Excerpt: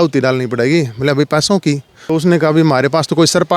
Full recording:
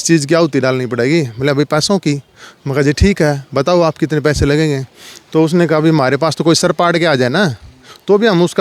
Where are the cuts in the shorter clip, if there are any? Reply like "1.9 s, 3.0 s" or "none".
1.9 s

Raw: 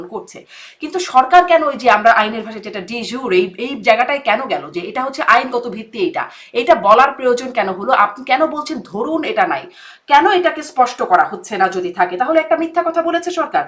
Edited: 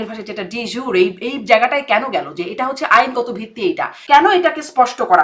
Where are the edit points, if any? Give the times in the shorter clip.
3.9 s

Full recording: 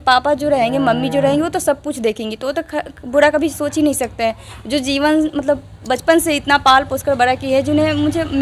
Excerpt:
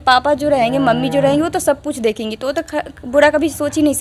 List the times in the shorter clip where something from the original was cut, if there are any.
none

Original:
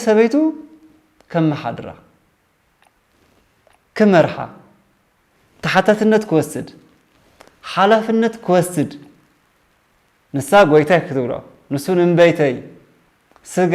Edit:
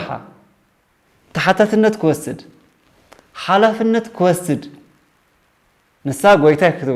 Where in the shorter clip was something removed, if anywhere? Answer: none

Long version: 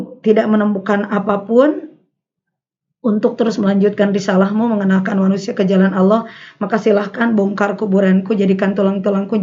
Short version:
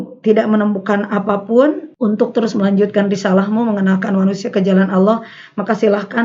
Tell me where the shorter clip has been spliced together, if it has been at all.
1.9 s

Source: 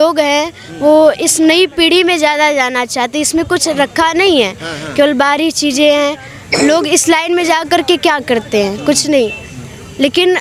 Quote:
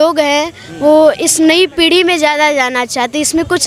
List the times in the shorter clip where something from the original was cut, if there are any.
none

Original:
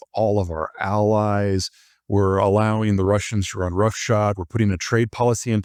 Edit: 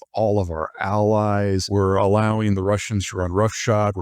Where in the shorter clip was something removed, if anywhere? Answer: 1.6 s

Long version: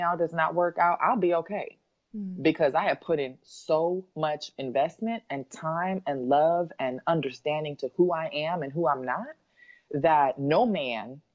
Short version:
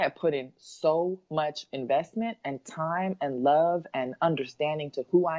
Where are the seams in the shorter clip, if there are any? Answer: none

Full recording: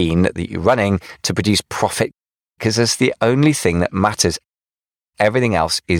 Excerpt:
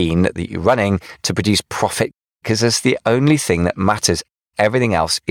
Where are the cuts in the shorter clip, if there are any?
2.3 s, 4.4 s

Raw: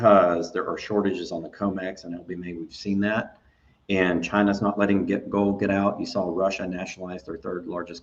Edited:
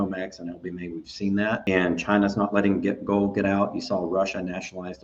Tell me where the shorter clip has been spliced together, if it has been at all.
1.6 s

